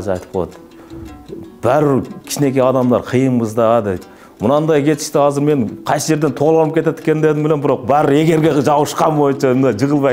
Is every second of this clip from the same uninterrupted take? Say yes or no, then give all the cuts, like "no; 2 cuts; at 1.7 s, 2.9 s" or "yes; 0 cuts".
yes; 0 cuts